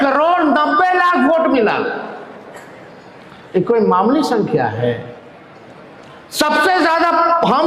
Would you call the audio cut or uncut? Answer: uncut